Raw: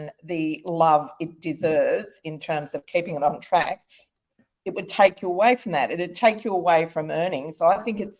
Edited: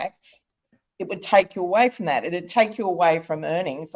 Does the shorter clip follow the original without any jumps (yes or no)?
yes